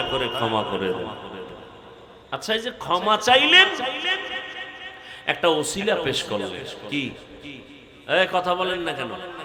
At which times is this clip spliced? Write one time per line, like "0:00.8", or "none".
none

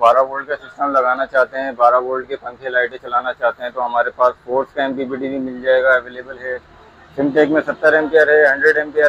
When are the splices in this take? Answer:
none

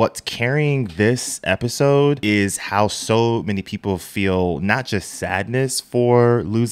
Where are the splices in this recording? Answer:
0:02.2

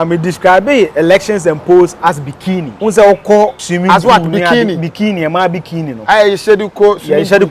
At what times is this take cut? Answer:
0:02.7
0:03.6

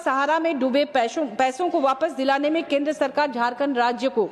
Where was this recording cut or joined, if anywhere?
none

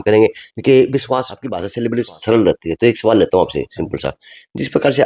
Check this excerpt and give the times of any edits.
0:01.7

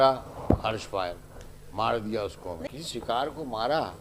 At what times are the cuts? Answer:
0:02.7

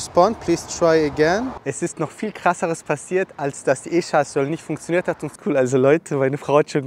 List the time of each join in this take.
0:01.6
0:05.3

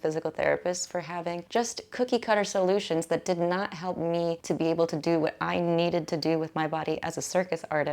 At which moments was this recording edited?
0:01.4
0:04.4

